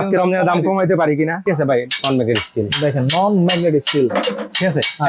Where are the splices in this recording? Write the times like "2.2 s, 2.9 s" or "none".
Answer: 1.5 s